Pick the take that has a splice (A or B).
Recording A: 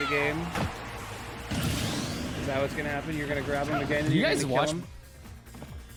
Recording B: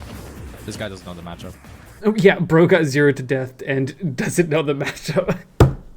B